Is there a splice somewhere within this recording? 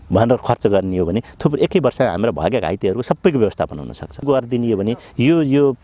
yes; 1 cut; at 4.2 s

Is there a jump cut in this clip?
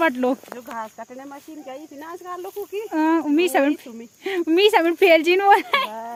no; 0 cuts

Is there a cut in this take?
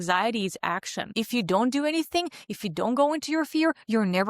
yes; 1 cut; at 1.1 s

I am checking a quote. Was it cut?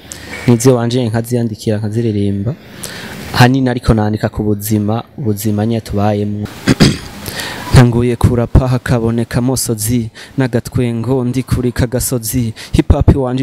yes; 1 cut; at 6.4 s

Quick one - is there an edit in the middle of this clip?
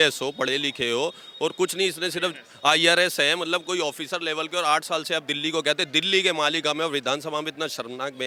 no; 0 cuts

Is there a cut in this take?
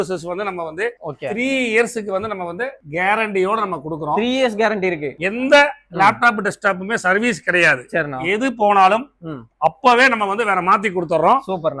no; 0 cuts

